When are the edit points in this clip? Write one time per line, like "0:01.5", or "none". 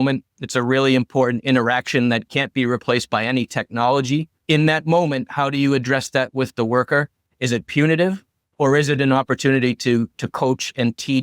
0:04.3